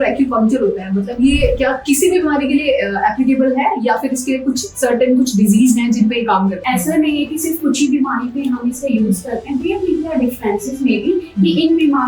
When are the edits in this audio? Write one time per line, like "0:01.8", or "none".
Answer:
0:06.6